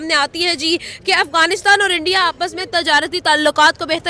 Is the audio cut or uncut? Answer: uncut